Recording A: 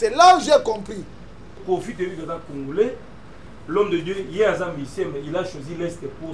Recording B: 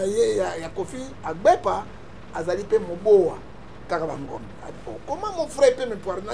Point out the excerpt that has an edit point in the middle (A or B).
A